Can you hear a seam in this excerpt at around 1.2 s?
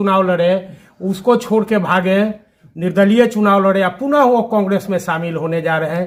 no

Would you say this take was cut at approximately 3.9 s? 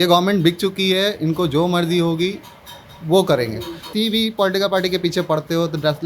yes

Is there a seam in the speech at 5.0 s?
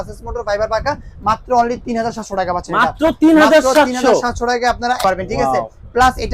yes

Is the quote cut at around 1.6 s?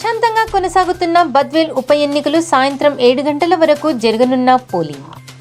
no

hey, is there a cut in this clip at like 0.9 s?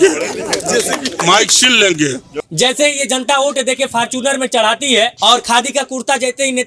no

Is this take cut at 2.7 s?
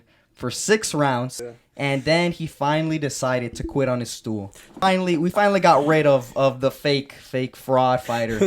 no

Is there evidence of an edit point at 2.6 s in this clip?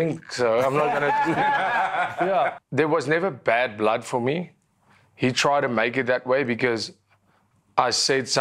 yes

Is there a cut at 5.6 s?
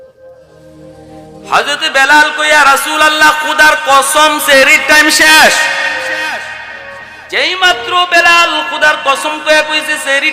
no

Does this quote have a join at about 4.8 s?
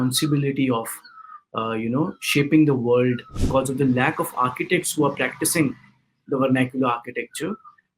no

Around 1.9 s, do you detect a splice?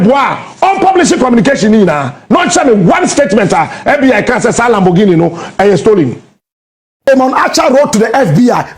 no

